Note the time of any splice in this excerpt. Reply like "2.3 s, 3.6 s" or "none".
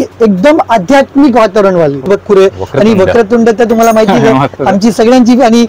2.1 s